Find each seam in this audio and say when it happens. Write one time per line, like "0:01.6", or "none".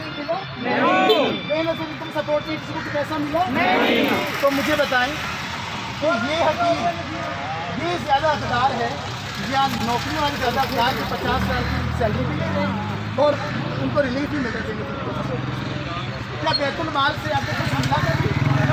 none